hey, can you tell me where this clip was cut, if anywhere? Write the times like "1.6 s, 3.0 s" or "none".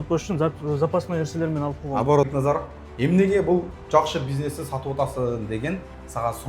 2.3 s